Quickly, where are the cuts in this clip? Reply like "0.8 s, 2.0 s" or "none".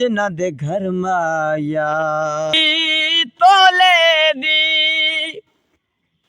2.5 s